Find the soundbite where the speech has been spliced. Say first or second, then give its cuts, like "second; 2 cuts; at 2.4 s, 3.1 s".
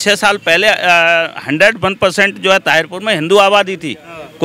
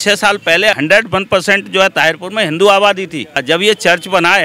second; 2 cuts; at 0.8 s, 3.4 s